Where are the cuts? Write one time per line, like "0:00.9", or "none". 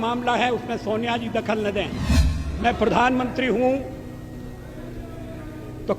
0:02.4